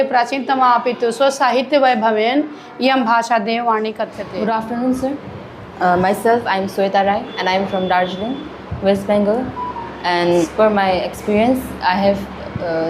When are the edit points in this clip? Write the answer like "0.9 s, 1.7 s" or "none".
4.2 s, 10.5 s